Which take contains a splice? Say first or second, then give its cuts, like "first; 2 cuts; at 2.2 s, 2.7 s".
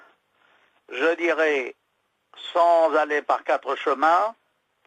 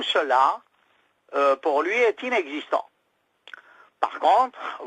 second; 1 cut; at 3.2 s